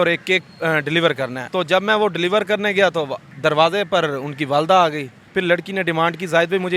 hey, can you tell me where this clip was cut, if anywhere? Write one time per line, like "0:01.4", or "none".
0:01.4
0:03.2
0:05.1